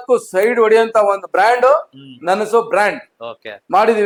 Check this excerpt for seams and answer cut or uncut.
uncut